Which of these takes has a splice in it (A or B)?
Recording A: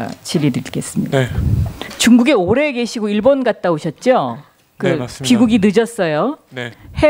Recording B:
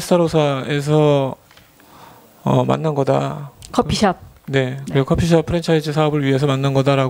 B